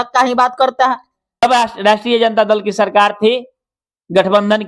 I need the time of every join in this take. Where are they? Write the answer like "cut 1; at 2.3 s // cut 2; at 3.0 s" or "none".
cut 1; at 1.4 s